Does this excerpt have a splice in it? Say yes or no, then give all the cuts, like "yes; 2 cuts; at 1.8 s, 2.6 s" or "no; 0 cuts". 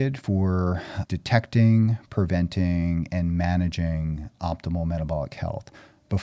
yes; 1 cut; at 0.9 s